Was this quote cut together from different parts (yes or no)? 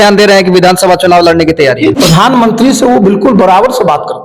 yes